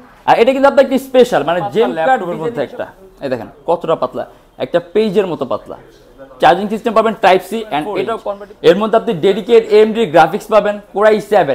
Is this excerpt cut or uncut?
cut